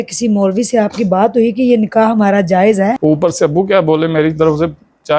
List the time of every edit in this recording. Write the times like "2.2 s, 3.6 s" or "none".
3.0 s

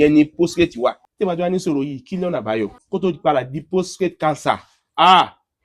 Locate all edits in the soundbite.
1.1 s, 2.8 s

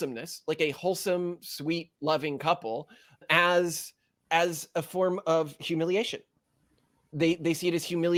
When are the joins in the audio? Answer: none

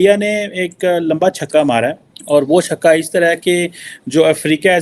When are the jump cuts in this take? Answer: 2.1 s

